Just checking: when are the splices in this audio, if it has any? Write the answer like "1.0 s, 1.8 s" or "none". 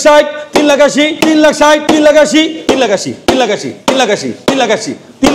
1.1 s, 1.8 s, 2.6 s